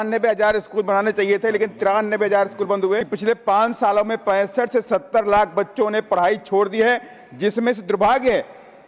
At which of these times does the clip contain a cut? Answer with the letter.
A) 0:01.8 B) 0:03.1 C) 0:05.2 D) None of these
B